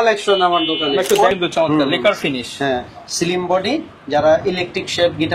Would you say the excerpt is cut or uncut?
cut